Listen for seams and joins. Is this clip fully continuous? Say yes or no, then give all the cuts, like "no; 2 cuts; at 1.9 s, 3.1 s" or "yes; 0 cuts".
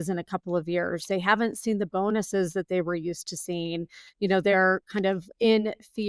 yes; 0 cuts